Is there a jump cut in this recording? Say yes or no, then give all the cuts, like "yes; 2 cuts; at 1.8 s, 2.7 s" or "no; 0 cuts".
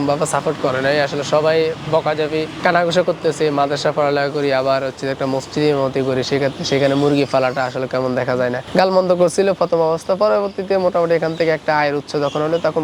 no; 0 cuts